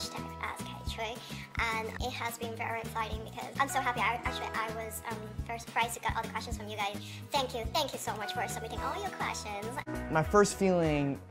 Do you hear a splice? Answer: yes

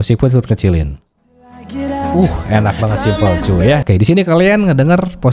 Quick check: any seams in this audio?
yes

